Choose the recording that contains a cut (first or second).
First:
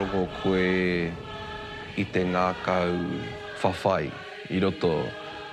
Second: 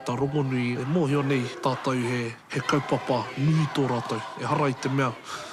second